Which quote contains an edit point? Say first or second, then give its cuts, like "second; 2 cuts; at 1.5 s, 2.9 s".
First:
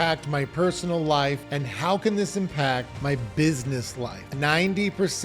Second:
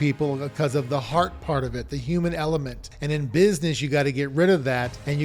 first; 3 cuts; at 1.5 s, 2.9 s, 4.2 s